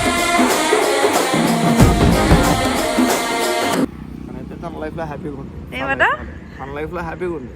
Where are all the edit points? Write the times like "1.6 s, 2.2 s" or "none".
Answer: 3.9 s